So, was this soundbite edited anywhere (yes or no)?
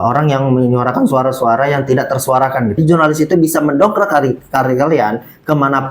yes